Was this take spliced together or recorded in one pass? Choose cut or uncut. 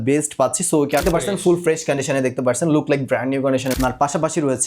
cut